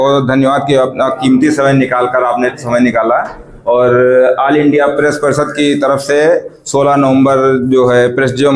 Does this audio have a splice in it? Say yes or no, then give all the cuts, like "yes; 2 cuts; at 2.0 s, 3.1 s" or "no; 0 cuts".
no; 0 cuts